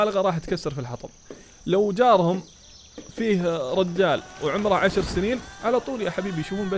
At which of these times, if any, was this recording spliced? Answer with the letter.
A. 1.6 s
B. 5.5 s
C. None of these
B